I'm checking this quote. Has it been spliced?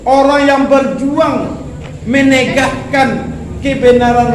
no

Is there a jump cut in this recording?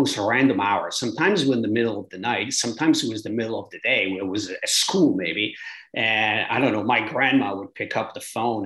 no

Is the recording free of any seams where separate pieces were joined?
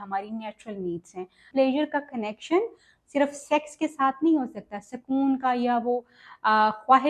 no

